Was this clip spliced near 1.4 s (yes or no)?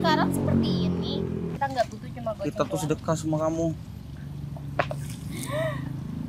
yes